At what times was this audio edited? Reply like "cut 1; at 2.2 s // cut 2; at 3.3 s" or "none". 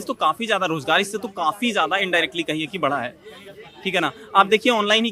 none